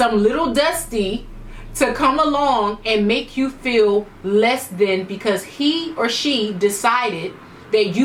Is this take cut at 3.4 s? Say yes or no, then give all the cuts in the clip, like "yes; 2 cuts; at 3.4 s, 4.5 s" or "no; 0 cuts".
no; 0 cuts